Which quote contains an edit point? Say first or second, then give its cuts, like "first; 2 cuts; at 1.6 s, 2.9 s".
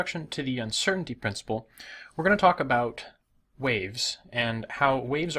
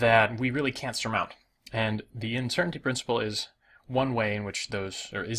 second; 1 cut; at 1.6 s